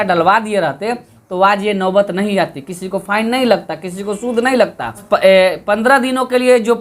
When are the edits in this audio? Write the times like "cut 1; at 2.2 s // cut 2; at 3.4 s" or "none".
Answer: cut 1; at 5.0 s